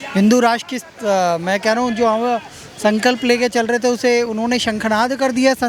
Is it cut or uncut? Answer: uncut